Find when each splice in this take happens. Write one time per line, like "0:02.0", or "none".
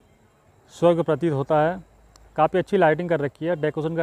none